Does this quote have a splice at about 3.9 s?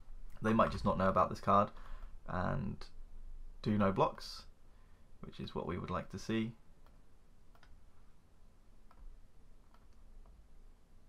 no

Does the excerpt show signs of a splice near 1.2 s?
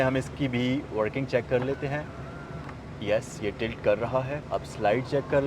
no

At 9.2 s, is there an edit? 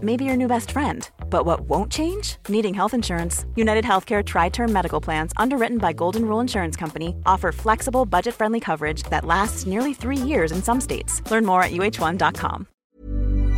no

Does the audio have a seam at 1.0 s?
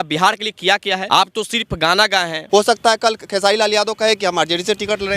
yes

